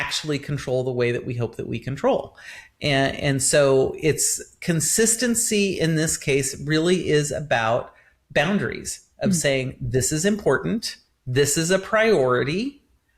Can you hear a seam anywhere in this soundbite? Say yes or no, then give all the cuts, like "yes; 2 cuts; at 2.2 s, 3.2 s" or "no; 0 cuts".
no; 0 cuts